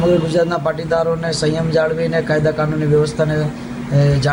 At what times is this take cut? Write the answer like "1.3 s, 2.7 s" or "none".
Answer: none